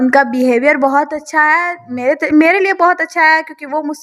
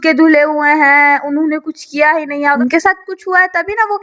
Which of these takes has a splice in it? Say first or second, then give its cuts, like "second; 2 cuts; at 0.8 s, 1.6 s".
second; 1 cut; at 2.6 s